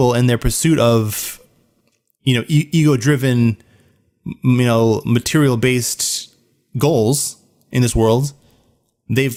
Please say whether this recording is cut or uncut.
uncut